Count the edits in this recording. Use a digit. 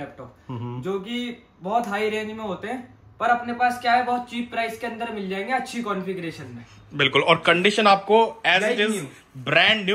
0